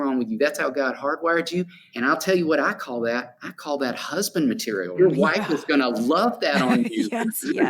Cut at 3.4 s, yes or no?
no